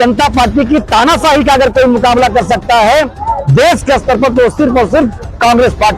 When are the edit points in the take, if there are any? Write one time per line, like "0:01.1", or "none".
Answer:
none